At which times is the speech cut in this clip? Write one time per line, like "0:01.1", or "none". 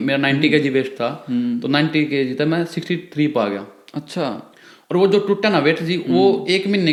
none